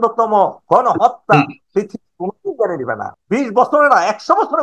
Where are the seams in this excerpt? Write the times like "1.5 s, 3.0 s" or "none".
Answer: 3.1 s